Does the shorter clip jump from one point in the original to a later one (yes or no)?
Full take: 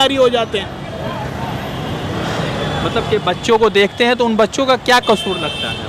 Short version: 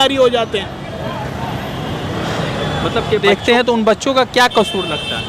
yes